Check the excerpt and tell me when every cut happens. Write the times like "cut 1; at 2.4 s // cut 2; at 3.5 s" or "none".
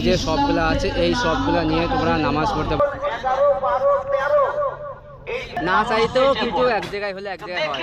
cut 1; at 2.8 s // cut 2; at 5.6 s